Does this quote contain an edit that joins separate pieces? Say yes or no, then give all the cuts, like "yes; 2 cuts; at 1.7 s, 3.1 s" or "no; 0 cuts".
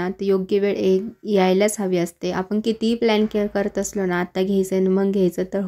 no; 0 cuts